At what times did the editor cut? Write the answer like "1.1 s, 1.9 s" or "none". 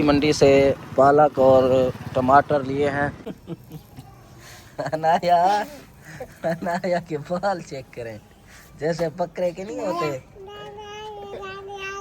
3.3 s